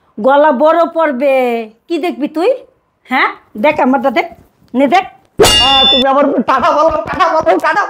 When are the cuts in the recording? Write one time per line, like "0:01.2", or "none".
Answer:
0:05.7